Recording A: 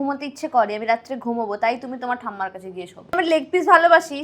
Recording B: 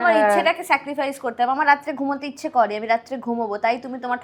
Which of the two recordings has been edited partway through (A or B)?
A